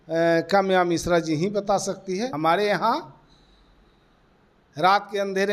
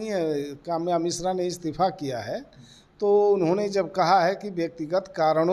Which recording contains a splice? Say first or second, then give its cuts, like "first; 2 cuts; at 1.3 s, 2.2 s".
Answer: first; 1 cut; at 2.3 s